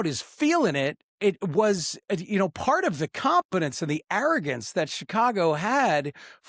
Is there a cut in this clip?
yes; 1 cut; at 1.1 s

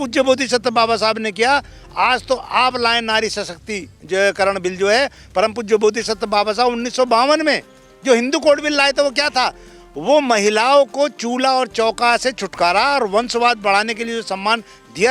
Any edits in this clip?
no; 0 cuts

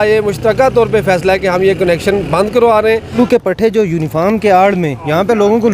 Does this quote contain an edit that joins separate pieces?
yes; 1 cut; at 3.1 s

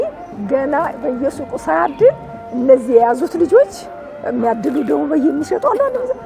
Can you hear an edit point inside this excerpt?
no; 0 cuts

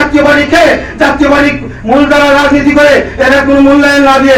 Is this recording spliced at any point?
no; 0 cuts

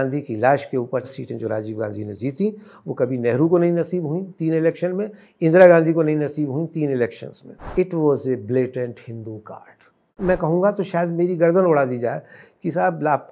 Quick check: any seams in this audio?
yes; 3 cuts; at 1.1 s, 7.6 s, 10.2 s

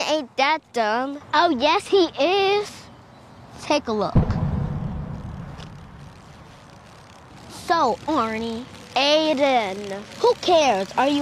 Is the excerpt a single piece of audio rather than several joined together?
no; 1 cut; at 1.2 s

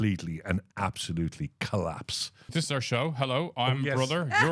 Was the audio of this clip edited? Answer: yes; 1 cut; at 2.5 s

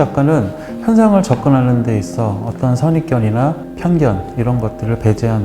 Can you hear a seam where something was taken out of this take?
yes; 1 cut; at 3.7 s

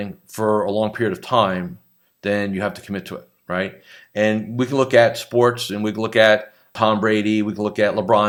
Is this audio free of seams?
yes; 0 cuts

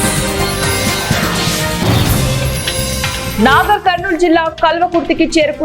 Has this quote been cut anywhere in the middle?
yes; 1 cut; at 3.3 s

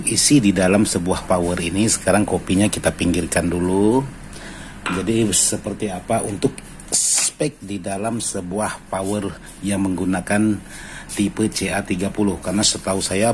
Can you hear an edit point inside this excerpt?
no; 0 cuts

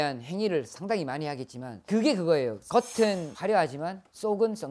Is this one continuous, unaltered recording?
yes; 0 cuts

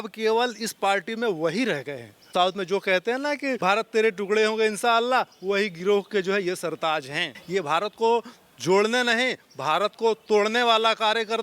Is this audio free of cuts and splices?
no; 3 cuts; at 2.3 s, 3.6 s, 7.4 s

